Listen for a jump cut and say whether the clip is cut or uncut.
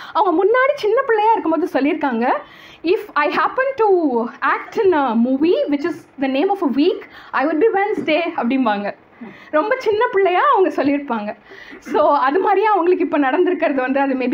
uncut